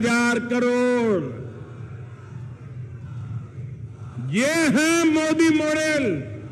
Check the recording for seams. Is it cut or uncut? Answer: uncut